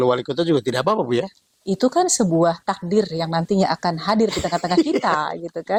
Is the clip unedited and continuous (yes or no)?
yes